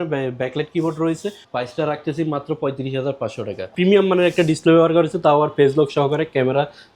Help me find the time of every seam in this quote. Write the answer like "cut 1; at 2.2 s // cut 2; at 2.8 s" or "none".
cut 1; at 1.4 s // cut 2; at 3.7 s